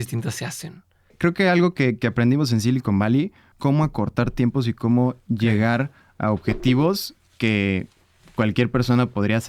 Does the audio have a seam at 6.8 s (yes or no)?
no